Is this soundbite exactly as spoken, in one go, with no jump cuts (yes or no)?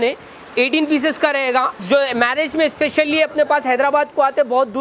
no